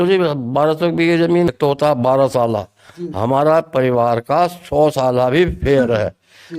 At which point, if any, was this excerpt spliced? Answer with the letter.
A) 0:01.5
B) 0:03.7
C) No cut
A